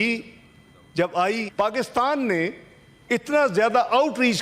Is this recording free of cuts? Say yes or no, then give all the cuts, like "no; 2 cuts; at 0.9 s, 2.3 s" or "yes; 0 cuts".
no; 1 cut; at 1.5 s